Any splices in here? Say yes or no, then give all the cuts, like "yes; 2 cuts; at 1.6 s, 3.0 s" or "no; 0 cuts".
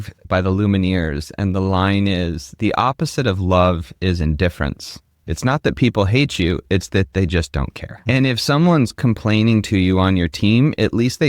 yes; 1 cut; at 5.2 s